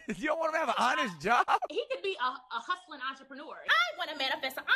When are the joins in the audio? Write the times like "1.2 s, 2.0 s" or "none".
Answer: 1.7 s, 3.6 s